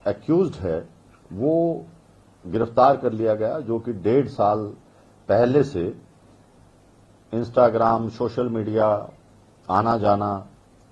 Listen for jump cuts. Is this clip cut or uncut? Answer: uncut